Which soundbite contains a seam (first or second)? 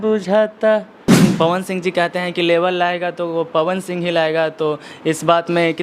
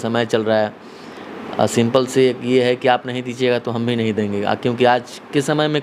first